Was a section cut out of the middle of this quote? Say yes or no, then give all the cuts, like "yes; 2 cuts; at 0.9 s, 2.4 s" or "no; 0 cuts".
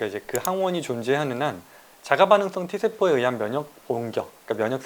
no; 0 cuts